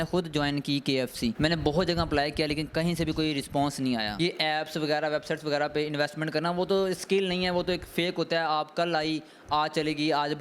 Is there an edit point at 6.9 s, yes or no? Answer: no